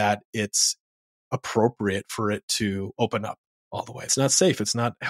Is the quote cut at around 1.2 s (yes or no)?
no